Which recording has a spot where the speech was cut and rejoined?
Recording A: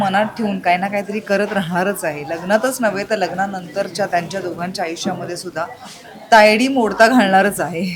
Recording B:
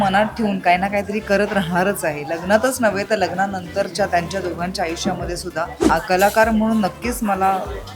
B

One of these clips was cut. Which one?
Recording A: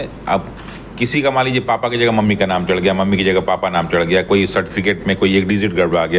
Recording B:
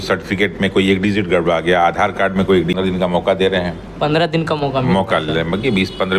B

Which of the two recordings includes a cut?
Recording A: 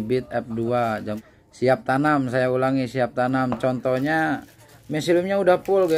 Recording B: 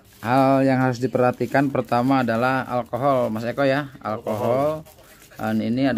A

